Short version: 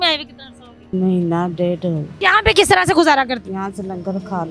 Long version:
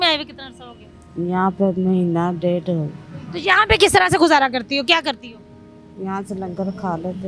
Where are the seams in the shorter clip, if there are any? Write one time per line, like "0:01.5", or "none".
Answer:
0:00.9
0:02.1
0:03.4

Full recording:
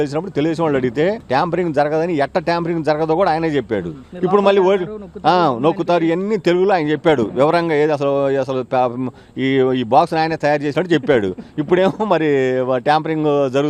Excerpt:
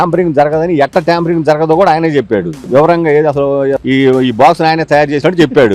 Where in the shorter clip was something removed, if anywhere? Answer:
0:02.6
0:03.8

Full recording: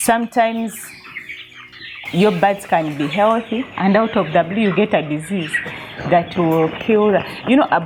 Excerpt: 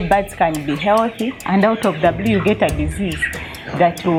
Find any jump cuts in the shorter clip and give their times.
none

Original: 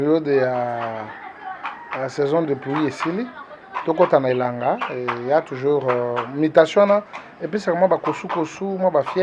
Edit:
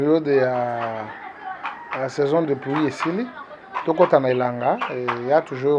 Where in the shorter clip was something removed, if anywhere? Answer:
none

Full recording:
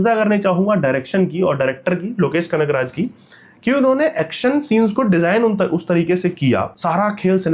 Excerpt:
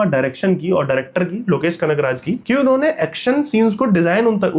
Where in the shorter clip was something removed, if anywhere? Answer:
0:02.4

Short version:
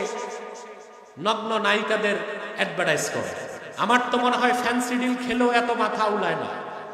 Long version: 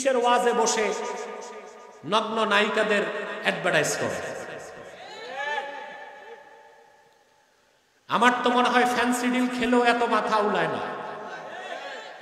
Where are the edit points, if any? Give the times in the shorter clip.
0:03.6

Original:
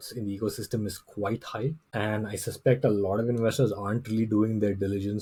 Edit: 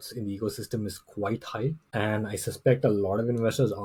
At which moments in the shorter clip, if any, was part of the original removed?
none

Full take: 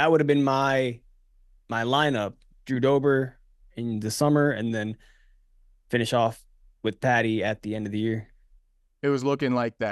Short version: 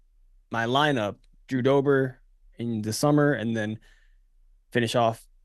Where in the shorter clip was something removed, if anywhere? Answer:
none

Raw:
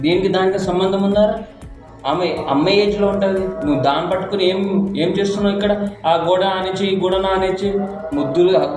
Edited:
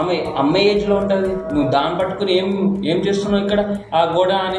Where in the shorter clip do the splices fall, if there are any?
none

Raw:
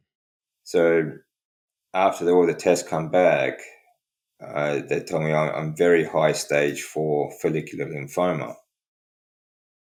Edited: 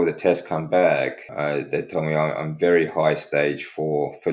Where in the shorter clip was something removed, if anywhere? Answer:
0:01.2

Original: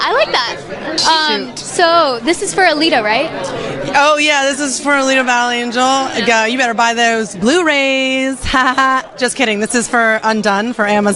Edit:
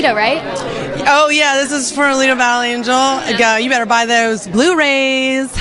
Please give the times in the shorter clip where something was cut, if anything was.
none

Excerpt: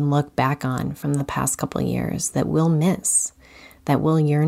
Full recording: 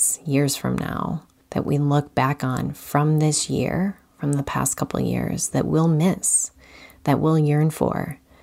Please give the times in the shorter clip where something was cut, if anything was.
0:00.9

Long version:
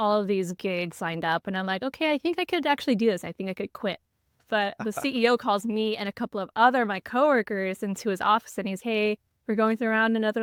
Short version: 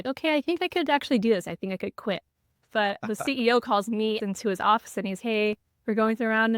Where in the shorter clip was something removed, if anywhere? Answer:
0:04.2

